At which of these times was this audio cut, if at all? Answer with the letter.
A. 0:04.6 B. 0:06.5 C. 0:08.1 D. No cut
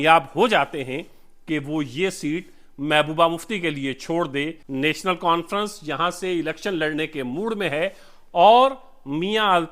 A